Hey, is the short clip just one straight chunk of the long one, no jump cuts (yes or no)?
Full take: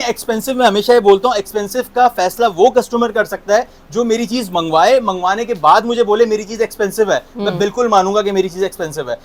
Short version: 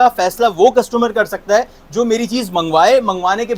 yes